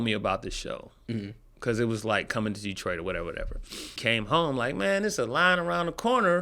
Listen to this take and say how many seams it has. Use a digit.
1